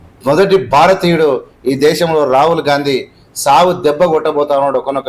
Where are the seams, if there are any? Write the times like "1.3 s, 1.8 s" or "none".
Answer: none